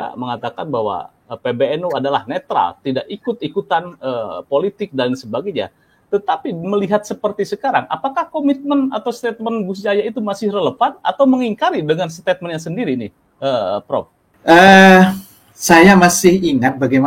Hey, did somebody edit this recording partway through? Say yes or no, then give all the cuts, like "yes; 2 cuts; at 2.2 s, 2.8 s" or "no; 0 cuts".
yes; 1 cut; at 14.2 s